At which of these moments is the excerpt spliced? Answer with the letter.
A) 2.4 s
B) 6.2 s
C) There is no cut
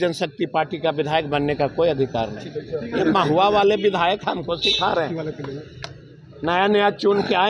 C